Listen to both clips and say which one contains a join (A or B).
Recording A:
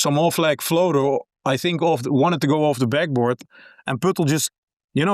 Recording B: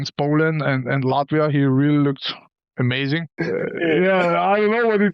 B